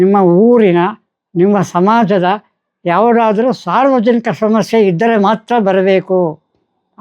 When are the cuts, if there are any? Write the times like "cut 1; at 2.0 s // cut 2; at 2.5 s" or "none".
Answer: none